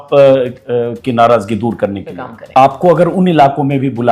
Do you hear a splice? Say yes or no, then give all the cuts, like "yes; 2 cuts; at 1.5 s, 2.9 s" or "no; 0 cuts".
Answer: yes; 1 cut; at 2.3 s